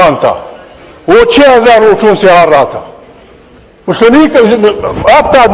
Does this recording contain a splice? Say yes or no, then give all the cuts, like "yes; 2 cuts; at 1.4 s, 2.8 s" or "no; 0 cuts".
no; 0 cuts